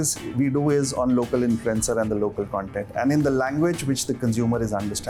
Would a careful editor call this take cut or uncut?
uncut